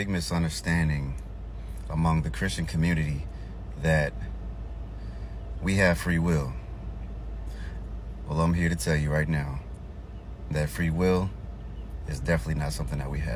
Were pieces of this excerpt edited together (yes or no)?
no